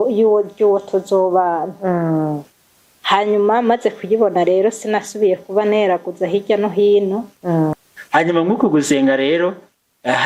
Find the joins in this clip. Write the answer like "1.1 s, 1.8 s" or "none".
7.7 s